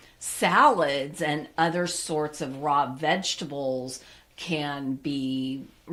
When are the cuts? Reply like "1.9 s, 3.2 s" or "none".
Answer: none

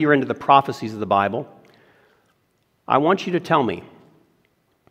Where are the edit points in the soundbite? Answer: none

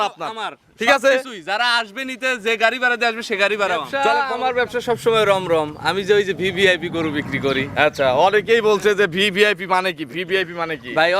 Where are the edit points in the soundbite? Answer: 3.9 s

